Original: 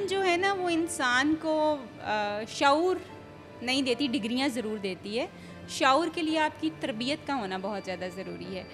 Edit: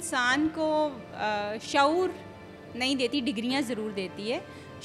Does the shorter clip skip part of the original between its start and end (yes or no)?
no